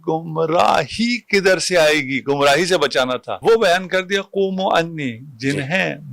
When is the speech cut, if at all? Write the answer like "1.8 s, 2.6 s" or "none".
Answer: 3.3 s